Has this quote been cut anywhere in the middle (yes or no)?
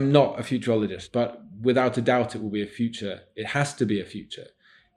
yes